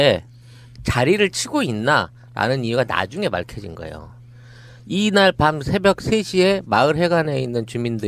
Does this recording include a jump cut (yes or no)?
no